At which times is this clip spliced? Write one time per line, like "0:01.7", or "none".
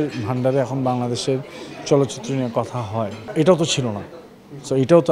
0:03.2